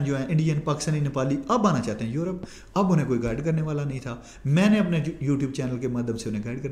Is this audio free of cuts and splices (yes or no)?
yes